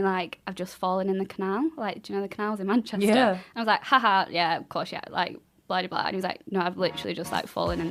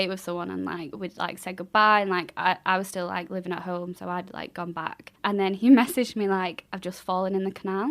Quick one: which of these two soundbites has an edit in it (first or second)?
second